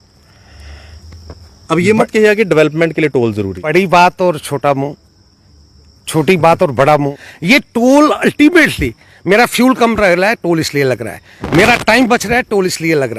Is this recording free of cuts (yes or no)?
no